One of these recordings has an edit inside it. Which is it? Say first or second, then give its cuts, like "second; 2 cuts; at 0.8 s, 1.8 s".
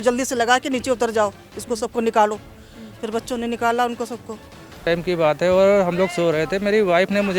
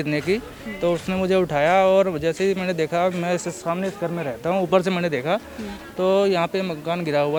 first; 1 cut; at 4.8 s